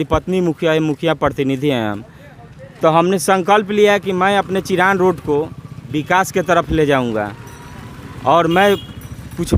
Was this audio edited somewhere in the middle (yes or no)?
no